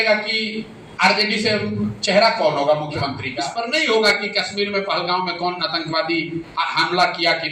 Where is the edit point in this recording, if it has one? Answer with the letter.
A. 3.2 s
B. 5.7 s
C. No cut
A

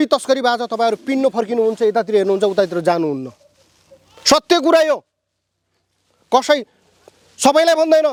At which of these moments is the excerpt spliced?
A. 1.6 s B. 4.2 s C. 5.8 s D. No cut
D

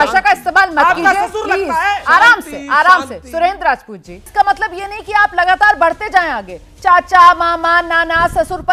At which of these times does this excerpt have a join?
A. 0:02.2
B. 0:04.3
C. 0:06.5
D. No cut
B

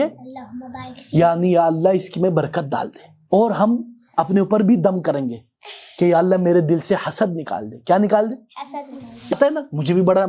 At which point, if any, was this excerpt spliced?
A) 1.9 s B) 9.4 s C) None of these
B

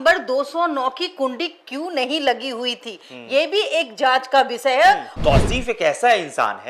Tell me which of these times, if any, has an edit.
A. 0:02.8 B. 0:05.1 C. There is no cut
B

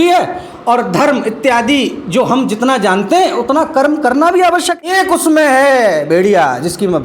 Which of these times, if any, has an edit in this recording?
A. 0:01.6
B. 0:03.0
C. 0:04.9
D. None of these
C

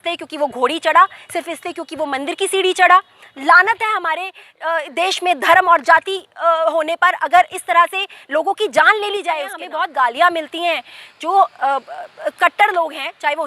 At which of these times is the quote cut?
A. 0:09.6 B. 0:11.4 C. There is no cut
A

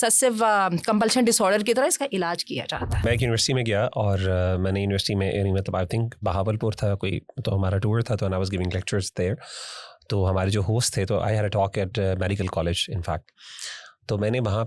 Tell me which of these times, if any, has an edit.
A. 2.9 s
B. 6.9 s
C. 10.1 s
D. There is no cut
A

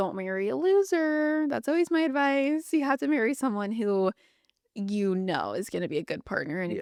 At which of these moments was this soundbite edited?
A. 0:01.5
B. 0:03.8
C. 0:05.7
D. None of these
D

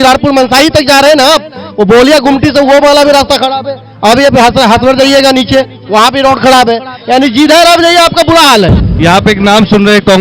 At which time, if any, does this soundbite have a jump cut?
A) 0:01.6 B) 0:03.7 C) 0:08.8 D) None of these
C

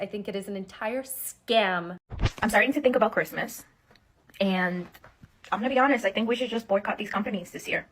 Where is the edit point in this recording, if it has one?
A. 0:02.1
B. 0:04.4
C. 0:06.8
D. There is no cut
A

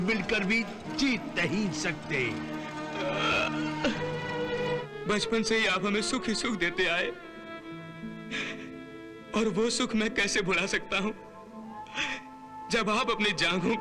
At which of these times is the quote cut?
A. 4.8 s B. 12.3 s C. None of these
A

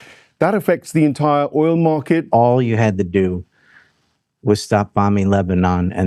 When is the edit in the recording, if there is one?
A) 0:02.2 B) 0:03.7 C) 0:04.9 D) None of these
A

